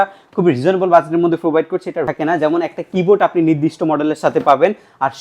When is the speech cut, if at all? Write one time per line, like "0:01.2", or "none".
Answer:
0:02.1

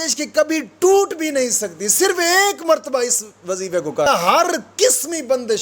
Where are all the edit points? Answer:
0:04.1

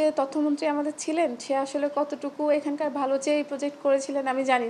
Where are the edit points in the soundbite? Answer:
none

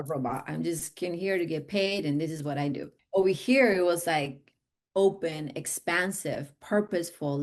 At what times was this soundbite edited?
0:02.9

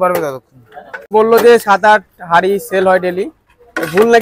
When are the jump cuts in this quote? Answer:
0:01.1

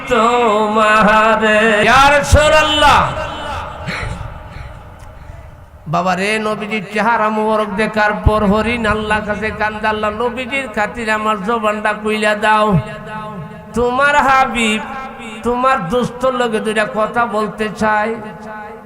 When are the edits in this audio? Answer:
0:01.8

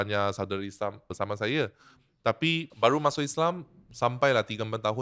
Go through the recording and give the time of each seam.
0:01.1
0:02.7

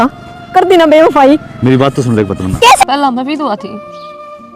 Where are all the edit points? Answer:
0:02.8

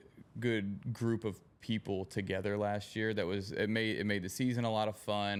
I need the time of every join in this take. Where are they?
none

